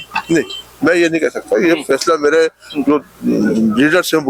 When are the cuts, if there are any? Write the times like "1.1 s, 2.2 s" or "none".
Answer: none